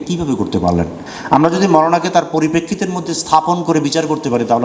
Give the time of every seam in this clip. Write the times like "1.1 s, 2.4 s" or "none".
1.1 s